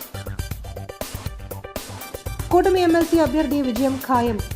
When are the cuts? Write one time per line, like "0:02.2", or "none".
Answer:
0:01.1